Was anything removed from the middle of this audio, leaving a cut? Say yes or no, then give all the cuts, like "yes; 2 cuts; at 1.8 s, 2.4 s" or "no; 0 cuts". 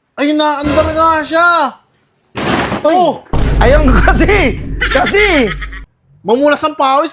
yes; 1 cut; at 5.7 s